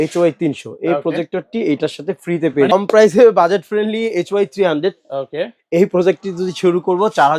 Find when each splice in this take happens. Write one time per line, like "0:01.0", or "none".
0:02.7